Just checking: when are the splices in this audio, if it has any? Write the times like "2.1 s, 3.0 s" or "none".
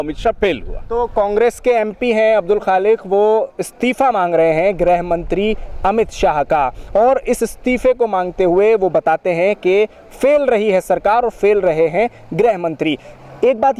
none